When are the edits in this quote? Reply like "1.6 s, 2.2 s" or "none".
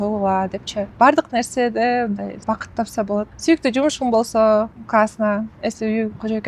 0.9 s, 2.4 s, 3.3 s, 4.8 s

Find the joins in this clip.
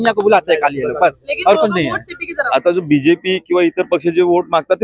2.4 s

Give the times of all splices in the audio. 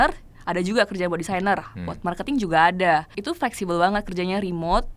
3.2 s

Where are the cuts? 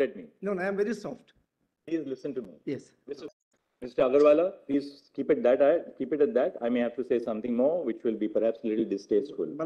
3.3 s

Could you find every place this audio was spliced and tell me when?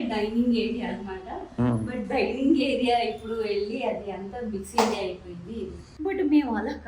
5.8 s

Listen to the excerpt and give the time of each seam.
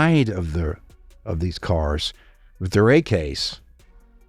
none

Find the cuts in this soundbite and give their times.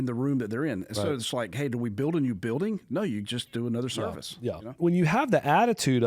4.8 s

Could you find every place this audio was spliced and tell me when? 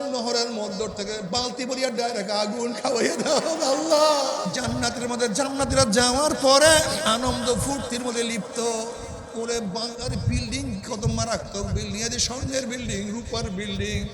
4.5 s, 7.0 s

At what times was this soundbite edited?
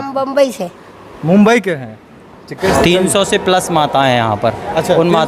2.7 s

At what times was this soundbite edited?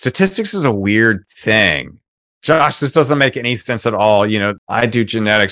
2.1 s, 4.5 s

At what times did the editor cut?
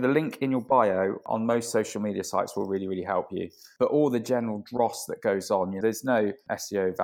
5.8 s

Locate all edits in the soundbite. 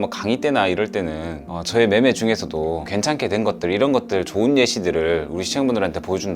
2.8 s

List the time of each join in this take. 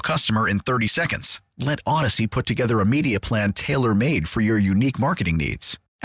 none

